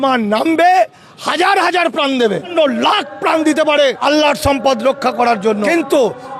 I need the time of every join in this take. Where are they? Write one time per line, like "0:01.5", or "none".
0:02.5
0:04.0
0:05.6

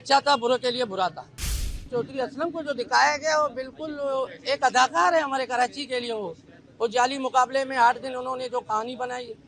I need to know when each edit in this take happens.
0:01.7

